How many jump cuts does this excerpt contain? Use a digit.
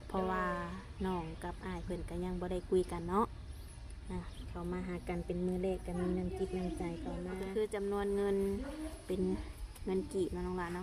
1